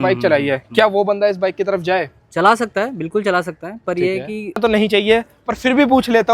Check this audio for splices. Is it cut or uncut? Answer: cut